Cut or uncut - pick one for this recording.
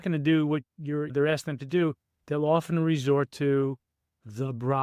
cut